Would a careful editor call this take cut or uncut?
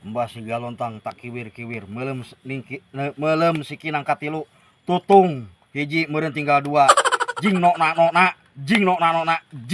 uncut